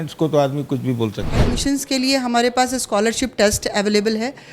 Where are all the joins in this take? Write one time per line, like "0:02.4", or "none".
0:01.5